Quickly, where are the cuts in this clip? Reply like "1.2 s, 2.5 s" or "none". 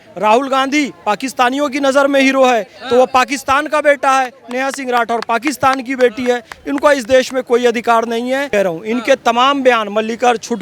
8.5 s